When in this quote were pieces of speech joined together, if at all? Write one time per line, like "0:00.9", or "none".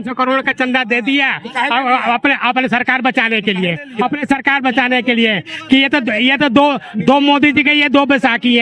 none